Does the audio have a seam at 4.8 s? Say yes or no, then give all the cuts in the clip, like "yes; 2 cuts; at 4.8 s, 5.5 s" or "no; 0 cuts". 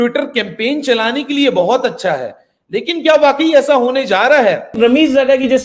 yes; 1 cut; at 4.8 s